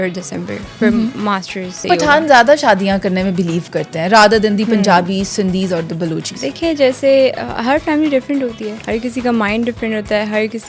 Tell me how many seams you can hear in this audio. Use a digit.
3